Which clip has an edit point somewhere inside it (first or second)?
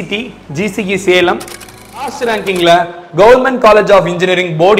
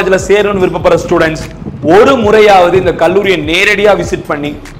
first